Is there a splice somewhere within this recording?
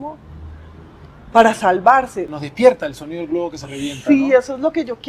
yes; 1 cut; at 2.3 s

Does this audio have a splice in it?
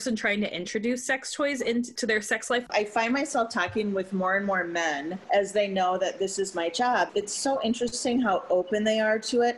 yes; 2 cuts; at 2.6 s, 7.1 s

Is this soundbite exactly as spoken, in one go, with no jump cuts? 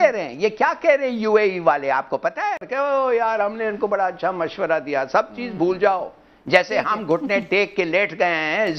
no; 1 cut; at 2.6 s

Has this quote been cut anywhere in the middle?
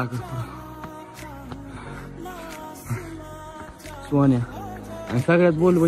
no; 0 cuts

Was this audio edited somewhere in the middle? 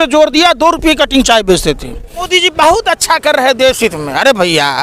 yes; 1 cut; at 2.3 s

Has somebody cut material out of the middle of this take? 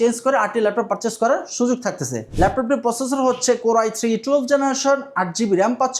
yes; 1 cut; at 2.2 s

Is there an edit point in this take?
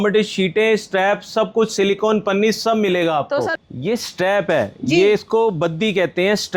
yes; 1 cut; at 3.6 s

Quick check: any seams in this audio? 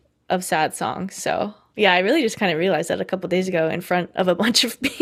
no; 0 cuts

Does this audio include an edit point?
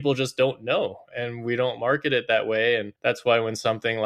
yes; 1 cut; at 2.9 s

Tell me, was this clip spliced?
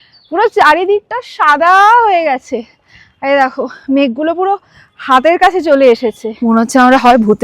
yes; 1 cut; at 6.3 s

